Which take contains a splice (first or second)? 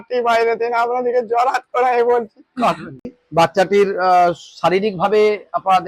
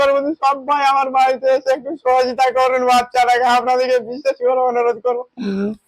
first